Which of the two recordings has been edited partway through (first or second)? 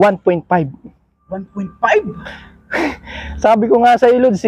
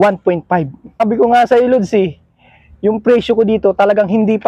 second